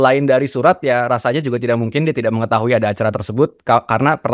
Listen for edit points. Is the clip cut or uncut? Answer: uncut